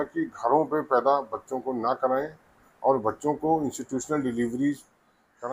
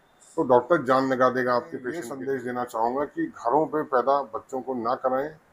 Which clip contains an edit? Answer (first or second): second